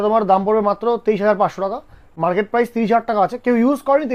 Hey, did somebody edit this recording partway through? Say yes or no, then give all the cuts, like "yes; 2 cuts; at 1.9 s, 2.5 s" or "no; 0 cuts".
no; 0 cuts